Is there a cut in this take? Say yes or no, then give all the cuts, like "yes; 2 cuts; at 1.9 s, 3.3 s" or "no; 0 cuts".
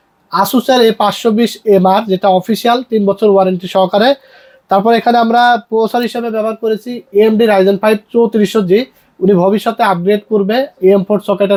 no; 0 cuts